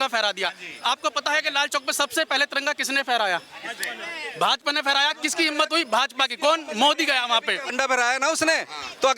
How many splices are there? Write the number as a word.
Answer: one